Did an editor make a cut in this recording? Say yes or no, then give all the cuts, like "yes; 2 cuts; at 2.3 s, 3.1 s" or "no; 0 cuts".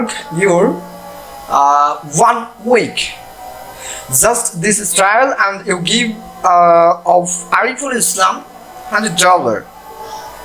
no; 0 cuts